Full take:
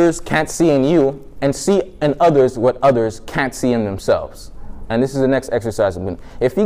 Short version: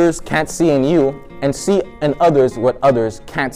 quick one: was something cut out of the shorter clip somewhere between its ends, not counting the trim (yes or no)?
no